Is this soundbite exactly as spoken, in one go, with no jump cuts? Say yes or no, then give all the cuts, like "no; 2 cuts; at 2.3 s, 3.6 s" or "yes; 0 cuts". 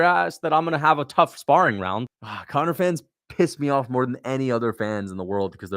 no; 1 cut; at 2.0 s